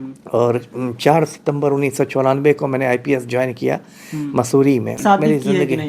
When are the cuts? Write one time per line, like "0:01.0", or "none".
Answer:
0:05.0